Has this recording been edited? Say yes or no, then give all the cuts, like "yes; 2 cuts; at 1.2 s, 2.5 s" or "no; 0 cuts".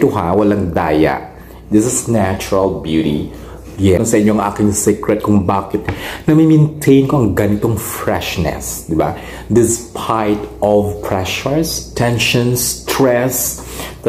yes; 1 cut; at 4.0 s